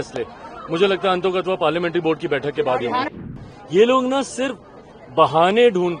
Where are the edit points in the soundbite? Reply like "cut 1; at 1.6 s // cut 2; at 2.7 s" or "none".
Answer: cut 1; at 3.2 s